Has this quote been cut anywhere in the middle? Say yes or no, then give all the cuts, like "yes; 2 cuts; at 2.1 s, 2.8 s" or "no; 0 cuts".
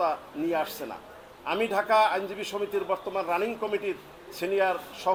no; 0 cuts